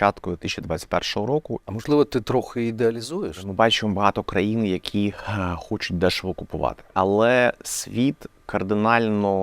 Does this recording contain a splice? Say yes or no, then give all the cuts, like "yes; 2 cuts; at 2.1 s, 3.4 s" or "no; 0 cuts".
yes; 3 cuts; at 1.6 s, 3.4 s, 6.8 s